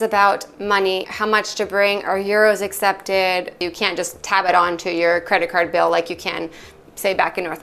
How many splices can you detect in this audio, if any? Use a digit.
2